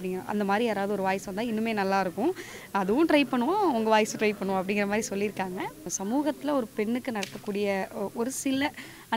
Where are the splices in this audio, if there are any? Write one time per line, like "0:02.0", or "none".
0:05.9